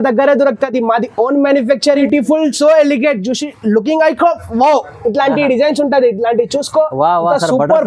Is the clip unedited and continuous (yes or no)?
no